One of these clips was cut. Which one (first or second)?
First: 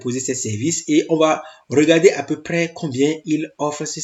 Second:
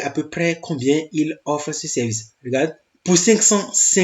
second